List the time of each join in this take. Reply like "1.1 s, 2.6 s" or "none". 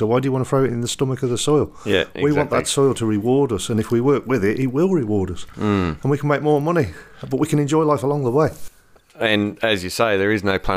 none